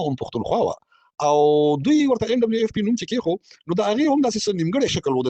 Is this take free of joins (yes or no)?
yes